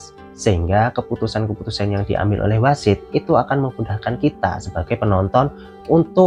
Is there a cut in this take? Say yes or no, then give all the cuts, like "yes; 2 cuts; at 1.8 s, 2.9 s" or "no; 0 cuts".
no; 0 cuts